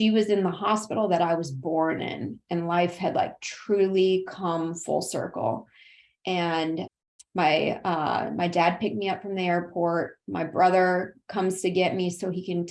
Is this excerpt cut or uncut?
cut